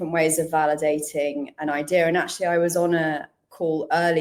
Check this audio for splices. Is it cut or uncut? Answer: uncut